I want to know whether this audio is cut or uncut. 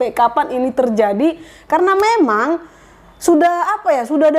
uncut